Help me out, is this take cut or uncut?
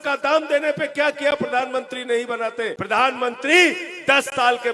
cut